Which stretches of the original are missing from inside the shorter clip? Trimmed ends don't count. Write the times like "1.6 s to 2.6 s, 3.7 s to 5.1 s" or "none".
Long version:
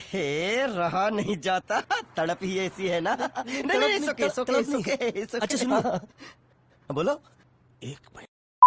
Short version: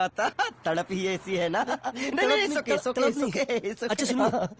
none